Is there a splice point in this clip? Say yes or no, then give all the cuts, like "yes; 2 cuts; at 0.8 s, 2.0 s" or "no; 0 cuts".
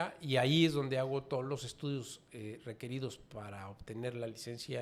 no; 0 cuts